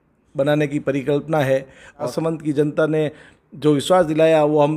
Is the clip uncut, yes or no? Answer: no